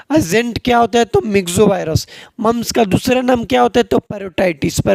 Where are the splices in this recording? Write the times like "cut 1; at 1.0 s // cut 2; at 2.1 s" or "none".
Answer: none